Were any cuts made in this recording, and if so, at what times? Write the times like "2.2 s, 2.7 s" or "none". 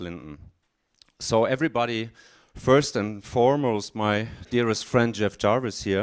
none